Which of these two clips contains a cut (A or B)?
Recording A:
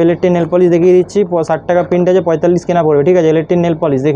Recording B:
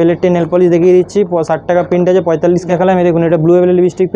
B